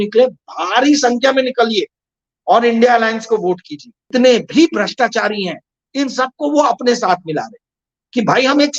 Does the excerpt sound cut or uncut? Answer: cut